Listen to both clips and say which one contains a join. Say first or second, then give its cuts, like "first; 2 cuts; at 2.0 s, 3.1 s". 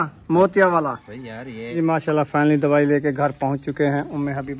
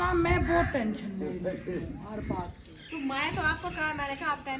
first; 1 cut; at 1.7 s